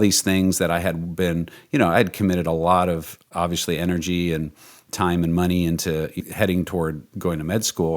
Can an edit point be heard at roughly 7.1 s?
yes; 2 cuts; at 6.2 s, 7.1 s

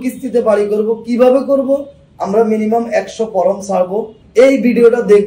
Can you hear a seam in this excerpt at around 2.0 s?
no; 1 cut; at 4.2 s

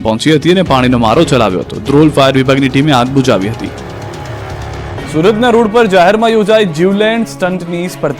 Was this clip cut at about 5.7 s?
no; 0 cuts

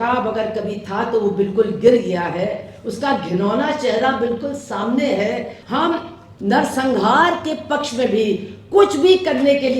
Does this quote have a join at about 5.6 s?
yes; 1 cut; at 5.6 s

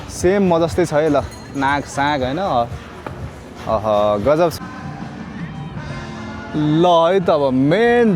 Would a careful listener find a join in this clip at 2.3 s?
no; 1 cut; at 4.5 s

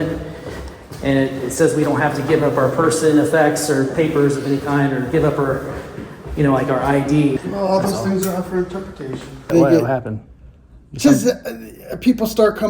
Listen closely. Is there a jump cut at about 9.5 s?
yes; 2 cuts; at 7.4 s, 9.5 s

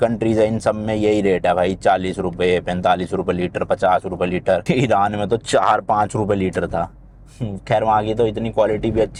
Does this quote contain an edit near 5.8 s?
no; 0 cuts

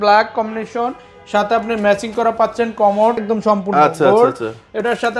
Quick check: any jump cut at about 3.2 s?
yes; 1 cut; at 3.2 s

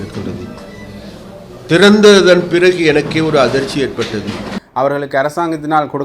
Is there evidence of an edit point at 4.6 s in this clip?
yes; 1 cut; at 4.6 s

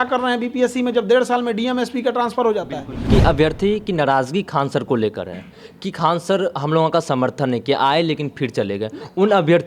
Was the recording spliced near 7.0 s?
no; 1 cut; at 3.1 s

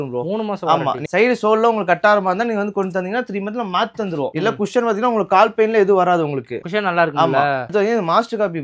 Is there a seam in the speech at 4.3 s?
yes; 3 cuts; at 1.1 s, 4.3 s, 7.7 s

